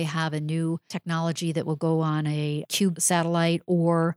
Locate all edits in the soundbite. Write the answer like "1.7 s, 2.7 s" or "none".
0.9 s, 2.9 s